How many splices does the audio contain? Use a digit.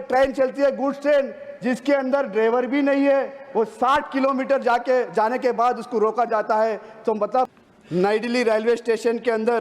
1